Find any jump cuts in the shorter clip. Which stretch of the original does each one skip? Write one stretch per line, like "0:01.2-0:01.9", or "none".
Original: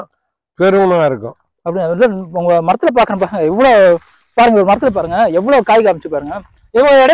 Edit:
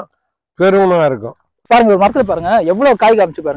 0:01.5-0:04.2